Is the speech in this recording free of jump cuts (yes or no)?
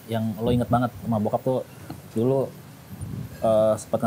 yes